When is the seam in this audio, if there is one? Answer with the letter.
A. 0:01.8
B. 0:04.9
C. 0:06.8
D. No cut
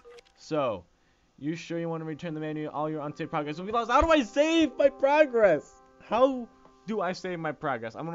A